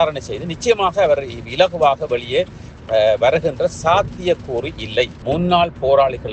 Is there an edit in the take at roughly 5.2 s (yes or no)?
yes